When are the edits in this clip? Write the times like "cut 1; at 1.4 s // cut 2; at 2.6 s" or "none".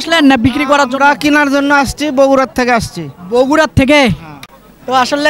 cut 1; at 4.3 s